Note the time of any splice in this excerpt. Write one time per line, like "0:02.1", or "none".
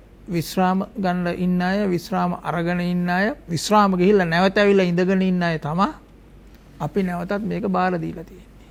none